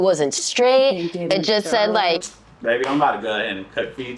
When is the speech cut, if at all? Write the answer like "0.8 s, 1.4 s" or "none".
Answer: 2.2 s